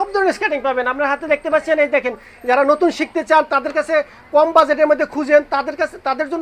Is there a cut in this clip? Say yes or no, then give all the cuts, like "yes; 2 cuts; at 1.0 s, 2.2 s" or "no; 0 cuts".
no; 0 cuts